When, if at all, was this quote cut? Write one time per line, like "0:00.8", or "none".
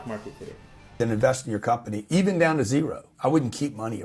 0:01.0